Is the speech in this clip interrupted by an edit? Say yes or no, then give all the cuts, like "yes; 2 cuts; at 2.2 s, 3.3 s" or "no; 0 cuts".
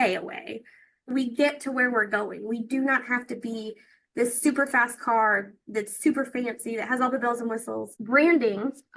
yes; 1 cut; at 7.9 s